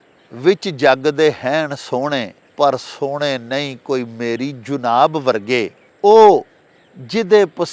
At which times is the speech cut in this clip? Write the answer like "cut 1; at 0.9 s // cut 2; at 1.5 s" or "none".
cut 1; at 2.4 s // cut 2; at 5.8 s